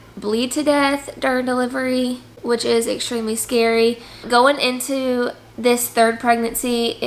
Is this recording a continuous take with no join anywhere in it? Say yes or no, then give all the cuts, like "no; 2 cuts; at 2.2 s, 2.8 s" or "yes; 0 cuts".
yes; 0 cuts